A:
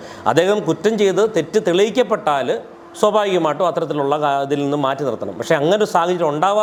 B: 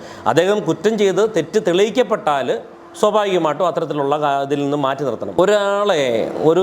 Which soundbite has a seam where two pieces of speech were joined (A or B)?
B